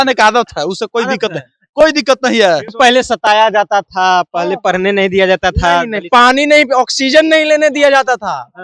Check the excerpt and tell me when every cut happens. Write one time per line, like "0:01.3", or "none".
0:02.7